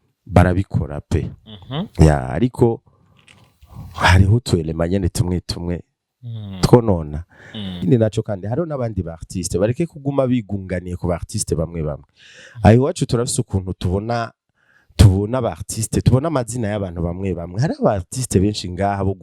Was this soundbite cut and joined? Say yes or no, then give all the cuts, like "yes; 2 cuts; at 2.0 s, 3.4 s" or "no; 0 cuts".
yes; 1 cut; at 7.8 s